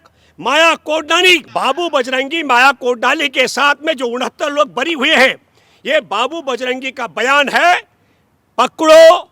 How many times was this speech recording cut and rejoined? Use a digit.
1